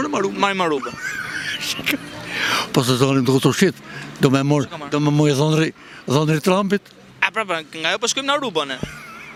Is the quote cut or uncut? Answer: uncut